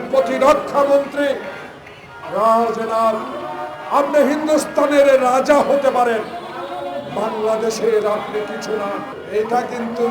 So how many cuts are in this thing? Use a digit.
1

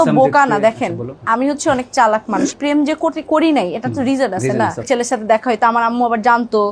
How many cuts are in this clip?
2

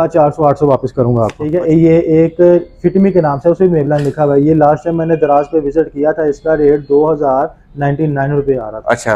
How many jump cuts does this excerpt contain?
1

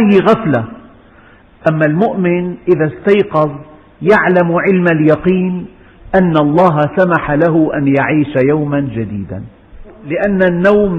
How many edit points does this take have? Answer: 1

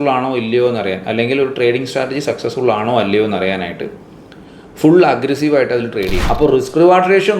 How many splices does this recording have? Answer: 1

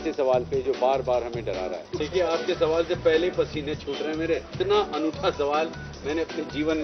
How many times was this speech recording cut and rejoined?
2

